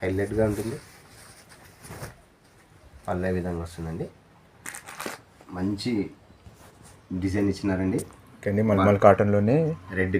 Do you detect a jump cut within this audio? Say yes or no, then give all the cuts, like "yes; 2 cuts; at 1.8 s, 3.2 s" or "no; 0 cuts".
yes; 1 cut; at 5.3 s